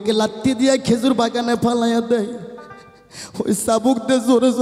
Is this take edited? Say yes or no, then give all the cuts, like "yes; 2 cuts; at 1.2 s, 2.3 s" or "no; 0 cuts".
no; 0 cuts